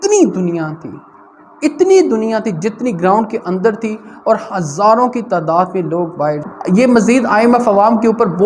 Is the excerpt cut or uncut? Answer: cut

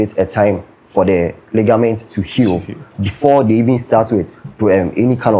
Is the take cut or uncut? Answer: uncut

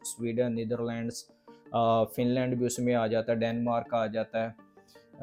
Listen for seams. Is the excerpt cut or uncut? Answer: uncut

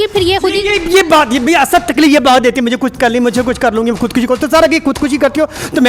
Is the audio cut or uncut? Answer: uncut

